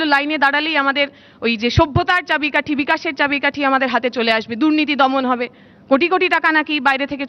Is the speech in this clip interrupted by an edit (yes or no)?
no